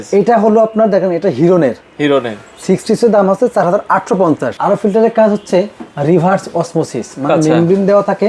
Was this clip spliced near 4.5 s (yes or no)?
yes